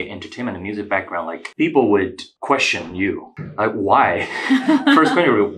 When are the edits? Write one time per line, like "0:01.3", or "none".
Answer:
0:01.4
0:02.2
0:03.4